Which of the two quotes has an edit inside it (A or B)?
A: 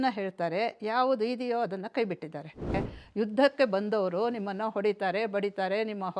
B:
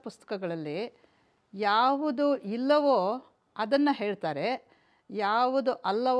A